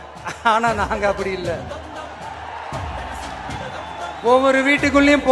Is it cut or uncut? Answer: uncut